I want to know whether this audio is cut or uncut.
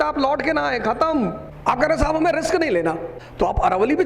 cut